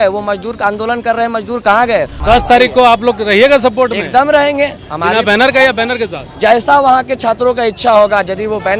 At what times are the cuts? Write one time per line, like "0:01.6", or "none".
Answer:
0:02.2